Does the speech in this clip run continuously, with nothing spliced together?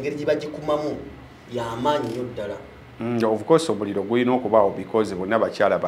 yes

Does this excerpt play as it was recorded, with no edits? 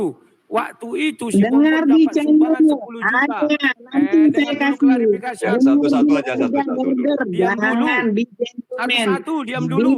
yes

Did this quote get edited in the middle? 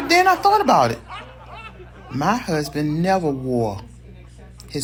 no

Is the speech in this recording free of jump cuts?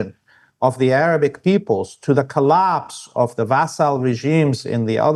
yes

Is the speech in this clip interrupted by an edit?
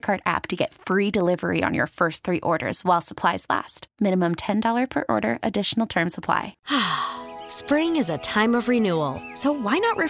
yes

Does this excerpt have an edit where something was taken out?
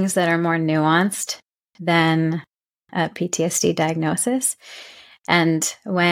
no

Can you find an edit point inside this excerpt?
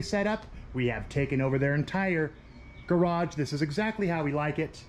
no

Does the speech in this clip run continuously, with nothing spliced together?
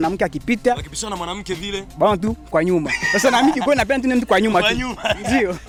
yes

